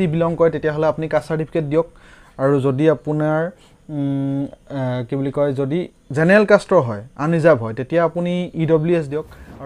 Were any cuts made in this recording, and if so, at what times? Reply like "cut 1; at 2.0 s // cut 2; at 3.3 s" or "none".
none